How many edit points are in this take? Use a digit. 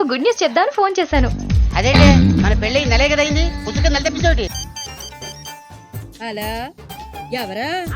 1